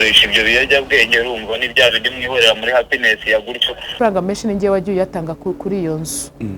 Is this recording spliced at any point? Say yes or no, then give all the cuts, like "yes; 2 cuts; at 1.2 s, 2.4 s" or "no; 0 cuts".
yes; 1 cut; at 3.9 s